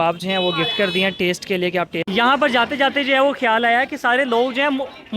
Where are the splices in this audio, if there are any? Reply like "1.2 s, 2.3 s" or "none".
2.0 s